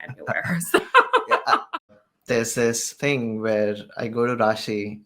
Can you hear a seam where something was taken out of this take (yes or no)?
yes